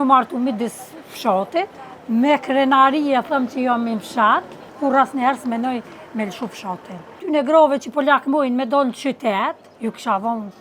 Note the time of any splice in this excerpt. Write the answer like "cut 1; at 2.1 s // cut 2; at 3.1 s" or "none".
cut 1; at 4.7 s // cut 2; at 7.2 s // cut 3; at 9.7 s

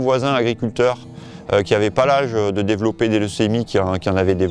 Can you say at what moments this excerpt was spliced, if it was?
none

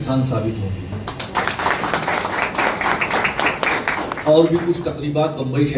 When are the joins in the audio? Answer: cut 1; at 1.0 s

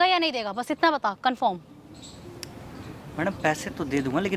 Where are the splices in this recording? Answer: none

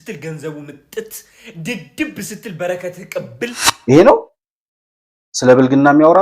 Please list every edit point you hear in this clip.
cut 1; at 3.7 s

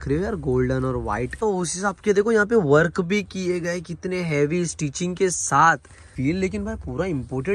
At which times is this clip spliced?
cut 1; at 1.4 s // cut 2; at 6.1 s

